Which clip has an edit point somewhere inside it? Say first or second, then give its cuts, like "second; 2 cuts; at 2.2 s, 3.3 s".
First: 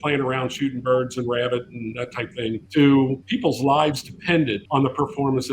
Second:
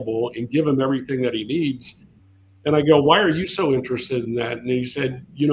first; 3 cuts; at 2.6 s, 3.2 s, 4.6 s